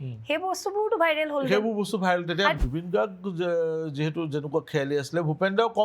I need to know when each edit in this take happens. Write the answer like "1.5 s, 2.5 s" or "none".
2.6 s